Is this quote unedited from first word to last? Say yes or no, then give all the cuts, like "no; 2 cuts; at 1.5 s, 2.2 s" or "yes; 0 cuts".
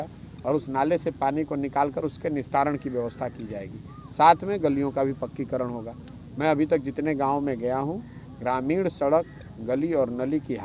yes; 0 cuts